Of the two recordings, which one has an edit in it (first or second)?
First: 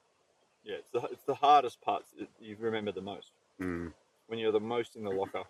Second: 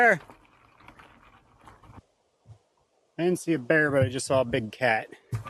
second